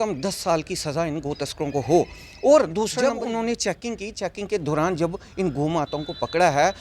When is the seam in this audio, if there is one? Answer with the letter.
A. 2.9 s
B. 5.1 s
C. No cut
A